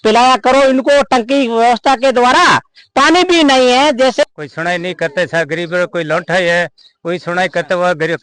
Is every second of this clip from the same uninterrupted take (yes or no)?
no